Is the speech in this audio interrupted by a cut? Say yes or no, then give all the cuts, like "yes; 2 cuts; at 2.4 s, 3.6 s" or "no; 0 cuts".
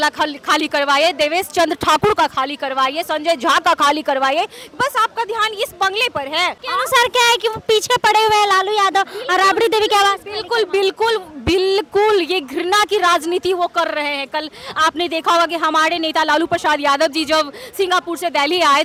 no; 0 cuts